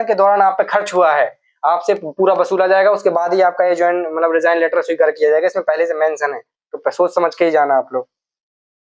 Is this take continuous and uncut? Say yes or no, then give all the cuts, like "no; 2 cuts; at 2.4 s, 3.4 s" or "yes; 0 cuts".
yes; 0 cuts